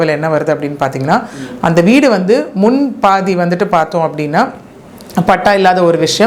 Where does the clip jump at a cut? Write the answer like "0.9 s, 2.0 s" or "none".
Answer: none